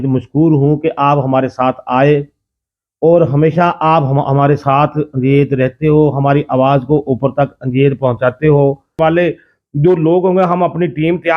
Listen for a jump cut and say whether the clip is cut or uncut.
cut